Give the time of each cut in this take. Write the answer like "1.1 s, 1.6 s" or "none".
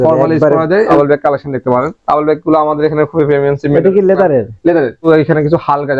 0.9 s, 5.1 s